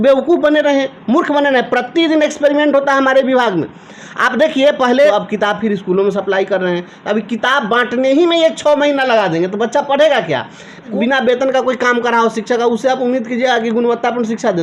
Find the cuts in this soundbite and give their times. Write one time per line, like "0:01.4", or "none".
0:05.1
0:10.9